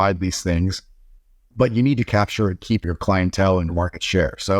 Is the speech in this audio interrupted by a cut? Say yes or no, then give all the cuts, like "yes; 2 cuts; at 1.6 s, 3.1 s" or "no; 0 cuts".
yes; 2 cuts; at 2.1 s, 3.7 s